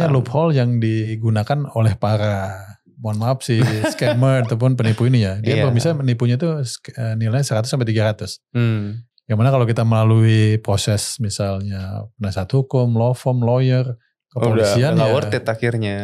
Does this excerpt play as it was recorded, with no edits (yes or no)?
no